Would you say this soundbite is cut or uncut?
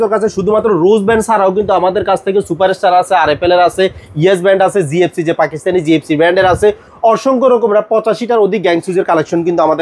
uncut